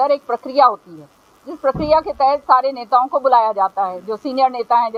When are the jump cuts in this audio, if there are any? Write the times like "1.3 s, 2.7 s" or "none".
none

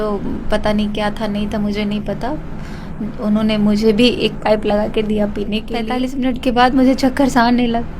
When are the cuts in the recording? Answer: 6.0 s

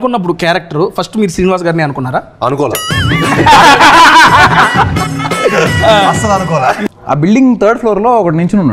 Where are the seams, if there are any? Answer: 6.8 s

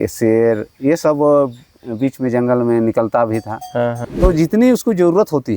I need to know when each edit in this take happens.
4.0 s

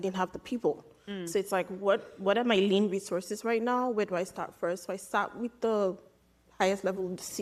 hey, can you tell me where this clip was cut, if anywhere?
none

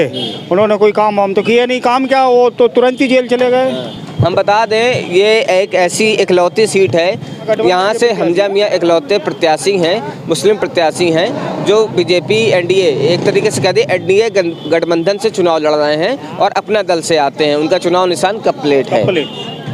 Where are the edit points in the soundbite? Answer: none

